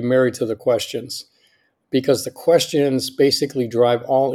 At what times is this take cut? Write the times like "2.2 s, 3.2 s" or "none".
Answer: 1.8 s